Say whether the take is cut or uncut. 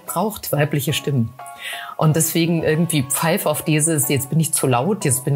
uncut